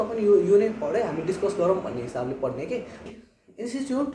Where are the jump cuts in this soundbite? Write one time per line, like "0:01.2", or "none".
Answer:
0:03.1